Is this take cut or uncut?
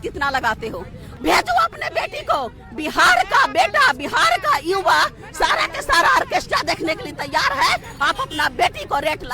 cut